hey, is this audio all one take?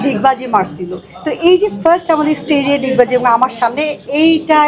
yes; 0 cuts

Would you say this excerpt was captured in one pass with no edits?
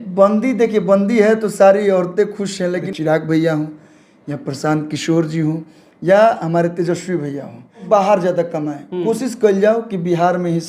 no; 2 cuts; at 2.9 s, 7.8 s

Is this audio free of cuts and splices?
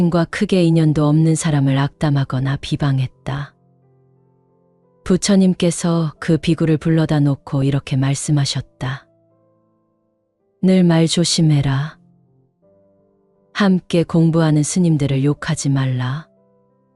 no; 2 cuts; at 12.0 s, 13.5 s

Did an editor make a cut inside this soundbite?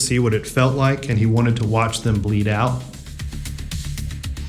yes; 1 cut; at 3.5 s

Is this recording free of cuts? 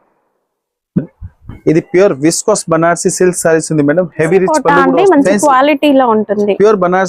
no; 1 cut; at 4.5 s

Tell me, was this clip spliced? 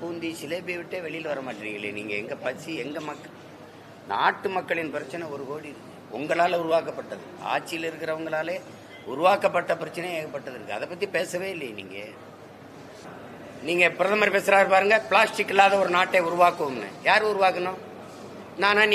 yes; 1 cut; at 13.1 s

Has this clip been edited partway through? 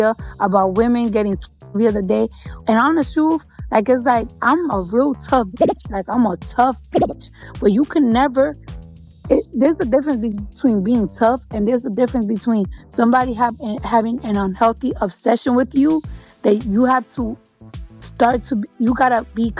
yes; 1 cut; at 17.5 s

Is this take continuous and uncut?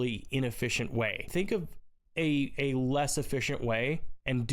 no; 1 cut; at 1.3 s

